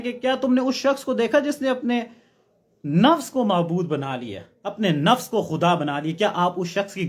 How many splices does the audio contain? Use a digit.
0